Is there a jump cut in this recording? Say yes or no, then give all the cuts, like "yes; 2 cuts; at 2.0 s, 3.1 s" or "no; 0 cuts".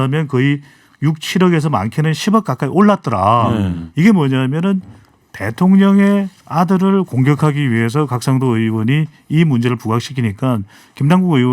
yes; 1 cut; at 3.8 s